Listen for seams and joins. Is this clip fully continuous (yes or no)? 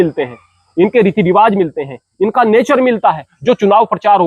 no